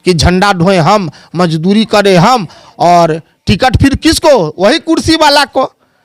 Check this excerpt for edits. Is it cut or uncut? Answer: uncut